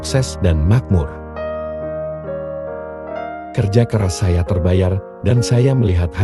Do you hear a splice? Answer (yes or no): no